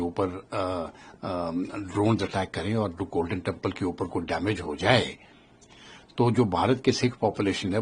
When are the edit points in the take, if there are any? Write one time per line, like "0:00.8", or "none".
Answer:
none